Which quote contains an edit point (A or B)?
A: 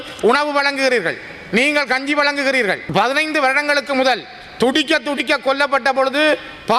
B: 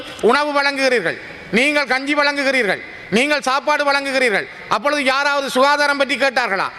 A